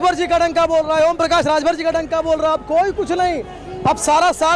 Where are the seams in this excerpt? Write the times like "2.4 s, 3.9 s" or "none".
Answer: none

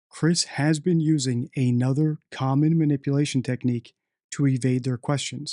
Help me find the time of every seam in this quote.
none

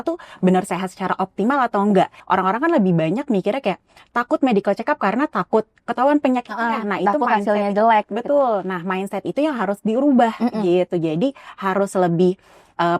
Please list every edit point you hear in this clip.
2.2 s

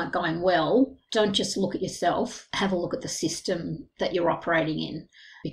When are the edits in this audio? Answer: 1.0 s

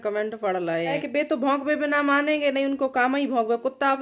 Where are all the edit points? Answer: 1.0 s

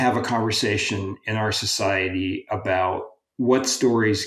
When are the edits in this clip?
3.2 s

